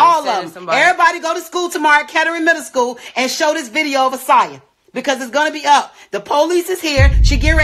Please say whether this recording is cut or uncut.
uncut